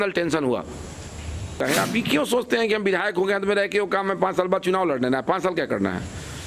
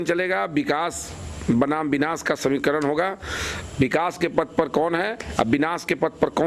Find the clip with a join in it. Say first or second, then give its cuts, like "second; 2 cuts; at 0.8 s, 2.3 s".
first; 1 cut; at 1.6 s